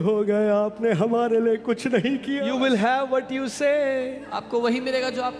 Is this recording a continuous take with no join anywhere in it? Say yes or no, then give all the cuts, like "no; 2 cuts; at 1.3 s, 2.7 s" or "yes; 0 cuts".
no; 1 cut; at 2.4 s